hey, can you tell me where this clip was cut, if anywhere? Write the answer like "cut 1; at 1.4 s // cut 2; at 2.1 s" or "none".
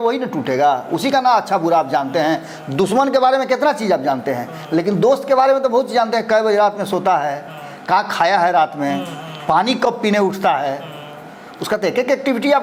none